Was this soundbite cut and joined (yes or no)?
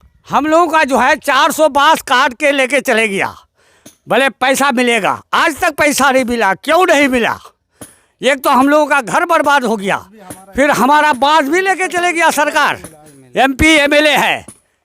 yes